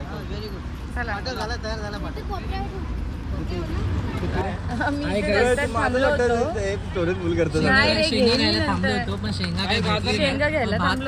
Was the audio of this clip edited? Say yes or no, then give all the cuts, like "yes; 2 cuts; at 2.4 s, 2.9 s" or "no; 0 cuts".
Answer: yes; 1 cut; at 4.4 s